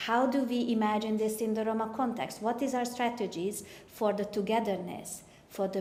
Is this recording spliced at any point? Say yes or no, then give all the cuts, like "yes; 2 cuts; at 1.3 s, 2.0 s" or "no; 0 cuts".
no; 0 cuts